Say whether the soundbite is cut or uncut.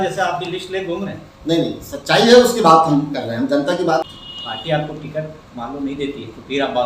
cut